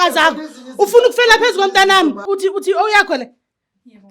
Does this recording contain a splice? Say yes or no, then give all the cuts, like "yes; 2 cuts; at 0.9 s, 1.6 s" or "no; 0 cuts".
yes; 1 cut; at 2.2 s